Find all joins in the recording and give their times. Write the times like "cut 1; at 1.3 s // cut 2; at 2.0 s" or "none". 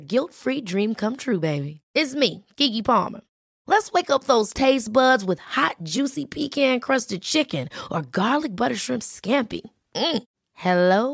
none